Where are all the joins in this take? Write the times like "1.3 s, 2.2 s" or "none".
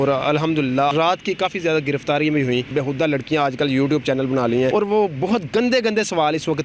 0.9 s, 2.7 s, 4.7 s